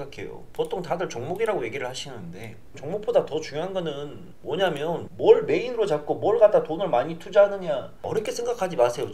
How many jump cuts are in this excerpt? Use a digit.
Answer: 3